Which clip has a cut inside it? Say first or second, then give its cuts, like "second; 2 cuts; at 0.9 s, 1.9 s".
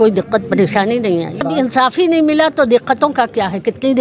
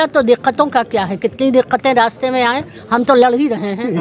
first; 1 cut; at 1.5 s